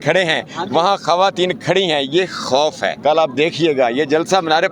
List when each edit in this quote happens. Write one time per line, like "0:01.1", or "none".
0:02.9